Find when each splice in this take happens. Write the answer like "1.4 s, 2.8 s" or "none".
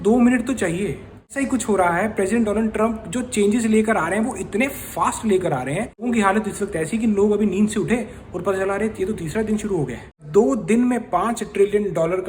1.3 s, 6.1 s, 10.2 s